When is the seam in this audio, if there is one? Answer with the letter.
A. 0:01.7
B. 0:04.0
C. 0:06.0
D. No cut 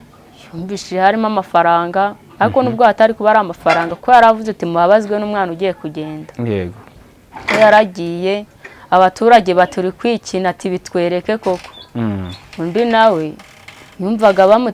D